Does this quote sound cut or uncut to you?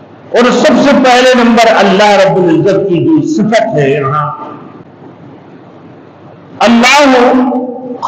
cut